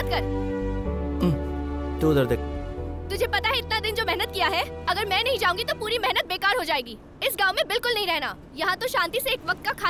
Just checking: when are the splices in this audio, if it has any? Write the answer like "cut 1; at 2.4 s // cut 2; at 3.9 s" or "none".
none